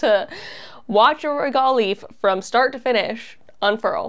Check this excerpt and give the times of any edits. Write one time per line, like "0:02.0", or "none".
none